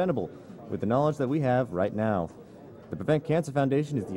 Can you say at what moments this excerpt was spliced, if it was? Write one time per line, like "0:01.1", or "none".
0:00.9